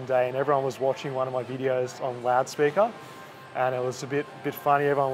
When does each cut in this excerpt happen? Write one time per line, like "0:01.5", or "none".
none